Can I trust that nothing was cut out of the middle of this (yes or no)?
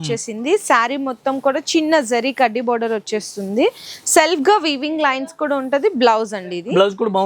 yes